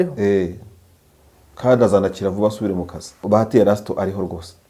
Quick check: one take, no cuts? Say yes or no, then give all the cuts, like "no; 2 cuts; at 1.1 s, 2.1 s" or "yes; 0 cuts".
no; 1 cut; at 3.2 s